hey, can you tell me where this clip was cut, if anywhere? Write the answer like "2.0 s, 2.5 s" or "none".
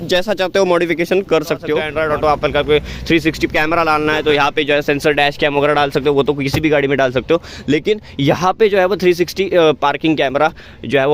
1.9 s